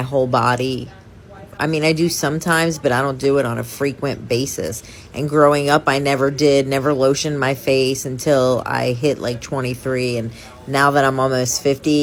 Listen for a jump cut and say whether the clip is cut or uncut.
uncut